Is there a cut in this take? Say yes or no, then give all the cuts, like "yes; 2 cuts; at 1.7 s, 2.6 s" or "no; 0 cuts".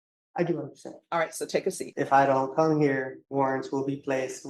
yes; 2 cuts; at 1.8 s, 3.2 s